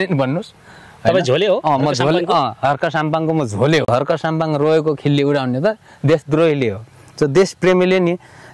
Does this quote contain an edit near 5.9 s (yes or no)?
no